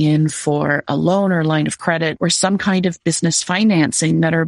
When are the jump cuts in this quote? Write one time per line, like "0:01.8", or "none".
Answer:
0:02.1